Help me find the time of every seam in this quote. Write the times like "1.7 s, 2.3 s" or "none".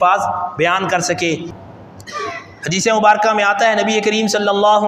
1.5 s